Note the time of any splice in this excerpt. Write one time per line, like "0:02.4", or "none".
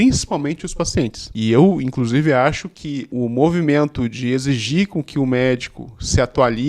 0:01.3
0:03.1